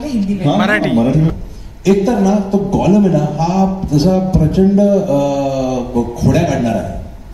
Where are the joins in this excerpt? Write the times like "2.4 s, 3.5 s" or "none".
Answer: 1.3 s